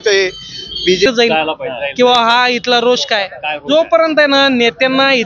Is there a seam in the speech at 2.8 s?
no; 1 cut; at 1.1 s

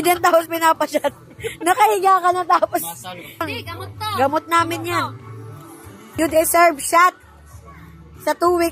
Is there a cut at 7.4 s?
no; 2 cuts; at 3.4 s, 6.1 s

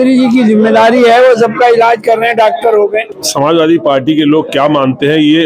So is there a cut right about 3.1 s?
yes; 1 cut; at 3.1 s

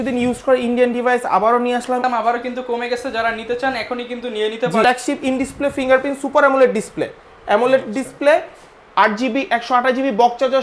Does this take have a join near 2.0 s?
yes; 2 cuts; at 2.0 s, 4.8 s

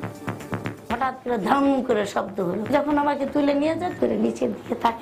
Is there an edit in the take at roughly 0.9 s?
yes; 2 cuts; at 0.9 s, 2.6 s

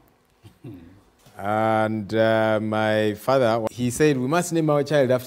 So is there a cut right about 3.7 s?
yes; 1 cut; at 3.7 s

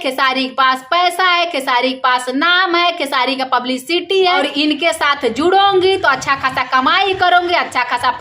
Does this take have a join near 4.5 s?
yes; 1 cut; at 4.5 s

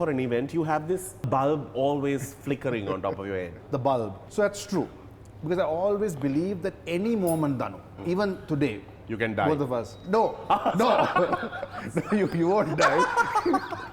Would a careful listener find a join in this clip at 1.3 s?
yes; 3 cuts; at 1.3 s, 3.6 s, 4.2 s

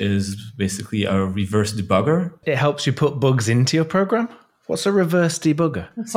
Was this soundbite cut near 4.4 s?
no; 1 cut; at 2.3 s

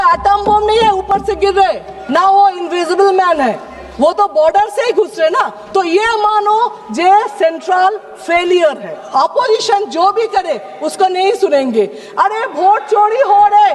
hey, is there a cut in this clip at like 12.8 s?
no; 1 cut; at 8.9 s

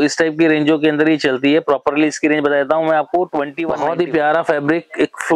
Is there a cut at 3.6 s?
yes; 1 cut; at 3.6 s

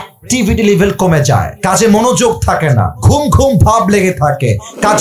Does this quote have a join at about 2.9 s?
yes; 2 cuts; at 1.5 s, 2.9 s

